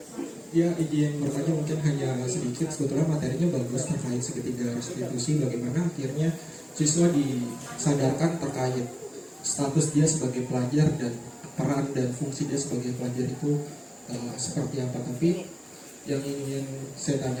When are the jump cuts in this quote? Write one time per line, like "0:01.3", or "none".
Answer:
none